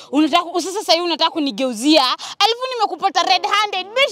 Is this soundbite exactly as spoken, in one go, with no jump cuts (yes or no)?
yes